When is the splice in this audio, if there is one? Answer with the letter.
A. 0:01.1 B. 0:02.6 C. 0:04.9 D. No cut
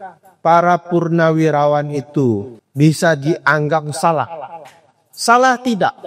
B